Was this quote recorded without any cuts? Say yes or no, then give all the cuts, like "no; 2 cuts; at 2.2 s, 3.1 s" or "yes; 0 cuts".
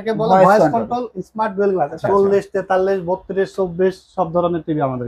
no; 1 cut; at 2.0 s